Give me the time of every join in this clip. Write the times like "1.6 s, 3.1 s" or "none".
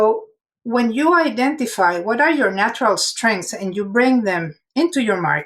4.5 s